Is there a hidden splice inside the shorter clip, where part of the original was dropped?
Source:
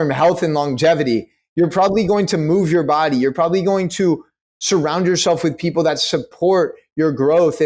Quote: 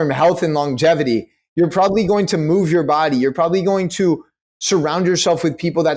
no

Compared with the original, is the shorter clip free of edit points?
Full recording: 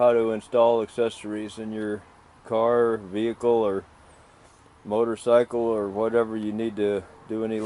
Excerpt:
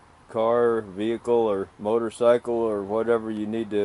no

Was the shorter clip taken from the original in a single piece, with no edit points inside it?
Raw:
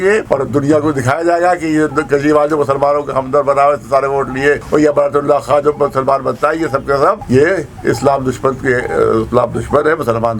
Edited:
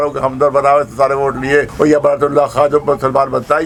yes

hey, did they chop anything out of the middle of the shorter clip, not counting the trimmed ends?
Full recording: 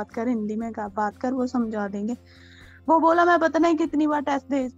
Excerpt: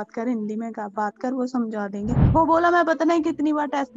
yes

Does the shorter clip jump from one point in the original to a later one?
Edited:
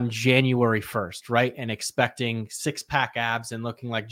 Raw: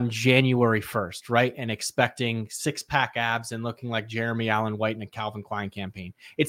no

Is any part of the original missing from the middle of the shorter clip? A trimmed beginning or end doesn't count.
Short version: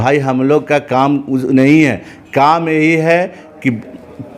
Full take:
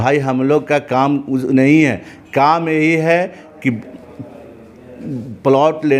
no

